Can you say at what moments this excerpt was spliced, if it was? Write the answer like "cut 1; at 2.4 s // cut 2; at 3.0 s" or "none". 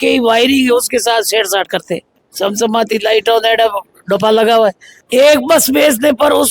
cut 1; at 2.3 s // cut 2; at 4.9 s